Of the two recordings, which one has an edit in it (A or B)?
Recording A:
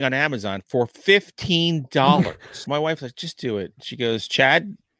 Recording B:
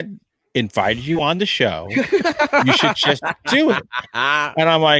A